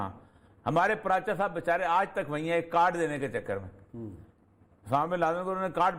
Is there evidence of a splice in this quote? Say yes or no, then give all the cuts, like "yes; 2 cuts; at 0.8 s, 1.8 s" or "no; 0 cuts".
no; 0 cuts